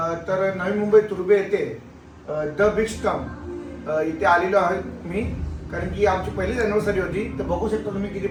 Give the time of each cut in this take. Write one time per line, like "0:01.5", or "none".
none